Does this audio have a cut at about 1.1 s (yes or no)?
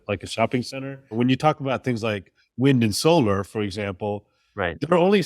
yes